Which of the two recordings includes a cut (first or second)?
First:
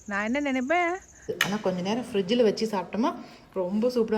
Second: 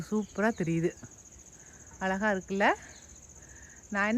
first